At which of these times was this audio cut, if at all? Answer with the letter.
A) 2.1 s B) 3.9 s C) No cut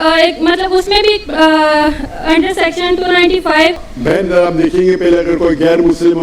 B